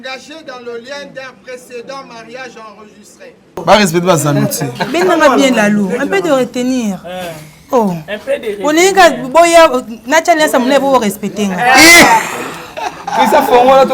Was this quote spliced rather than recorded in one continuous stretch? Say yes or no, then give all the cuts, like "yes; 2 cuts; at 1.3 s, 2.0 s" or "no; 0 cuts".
yes; 1 cut; at 3.6 s